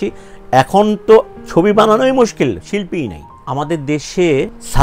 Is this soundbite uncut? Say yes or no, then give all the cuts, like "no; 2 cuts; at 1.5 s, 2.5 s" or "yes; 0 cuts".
no; 1 cut; at 3.1 s